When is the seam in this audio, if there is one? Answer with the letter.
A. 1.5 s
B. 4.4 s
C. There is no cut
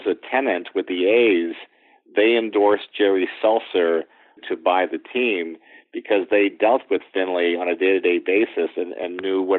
B